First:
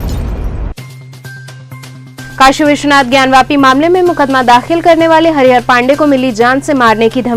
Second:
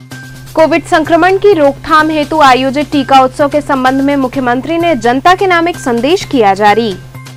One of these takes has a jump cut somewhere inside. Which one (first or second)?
first